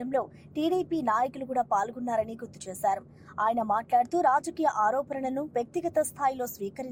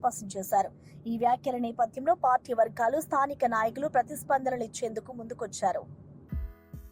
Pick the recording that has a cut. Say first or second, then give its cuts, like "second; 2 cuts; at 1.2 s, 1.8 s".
second; 1 cut; at 6.0 s